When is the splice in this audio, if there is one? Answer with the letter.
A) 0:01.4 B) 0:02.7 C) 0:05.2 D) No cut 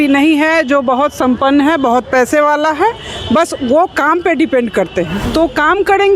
C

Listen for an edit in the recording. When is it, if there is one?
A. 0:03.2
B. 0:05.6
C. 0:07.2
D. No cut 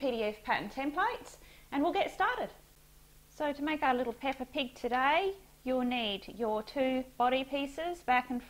D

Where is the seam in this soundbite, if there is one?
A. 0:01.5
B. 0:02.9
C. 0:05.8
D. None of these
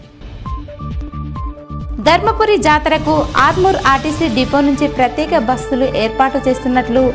A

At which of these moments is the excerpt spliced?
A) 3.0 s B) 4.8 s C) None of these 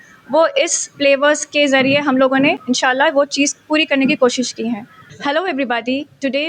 C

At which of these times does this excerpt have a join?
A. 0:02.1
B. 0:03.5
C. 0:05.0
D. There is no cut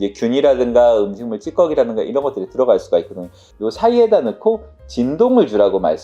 B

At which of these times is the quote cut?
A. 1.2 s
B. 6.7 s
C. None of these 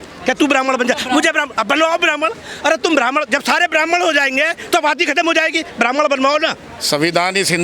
B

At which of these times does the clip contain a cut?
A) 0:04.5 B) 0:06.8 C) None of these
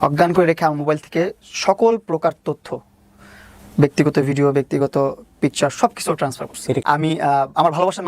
B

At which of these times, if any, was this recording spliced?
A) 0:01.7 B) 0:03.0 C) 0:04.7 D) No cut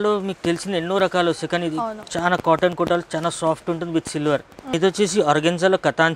C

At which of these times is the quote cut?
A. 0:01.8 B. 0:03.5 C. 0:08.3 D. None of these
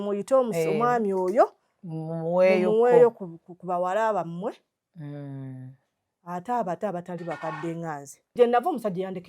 C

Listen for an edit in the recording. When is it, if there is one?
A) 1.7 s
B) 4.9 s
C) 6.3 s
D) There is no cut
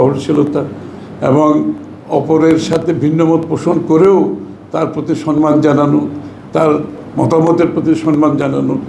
D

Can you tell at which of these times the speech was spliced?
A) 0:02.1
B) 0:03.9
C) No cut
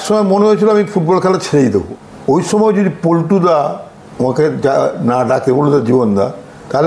A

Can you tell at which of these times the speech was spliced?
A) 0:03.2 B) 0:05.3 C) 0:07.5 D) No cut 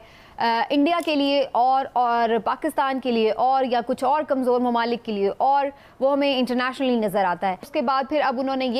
D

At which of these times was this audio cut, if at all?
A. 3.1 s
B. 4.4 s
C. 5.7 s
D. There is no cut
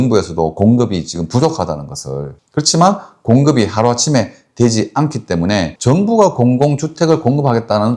C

